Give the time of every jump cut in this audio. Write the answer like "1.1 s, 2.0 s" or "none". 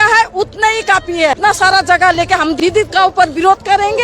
1.4 s, 2.6 s